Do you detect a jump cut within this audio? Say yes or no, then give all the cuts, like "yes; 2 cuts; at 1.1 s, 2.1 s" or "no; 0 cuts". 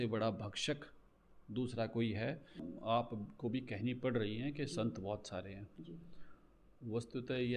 yes; 1 cut; at 2.7 s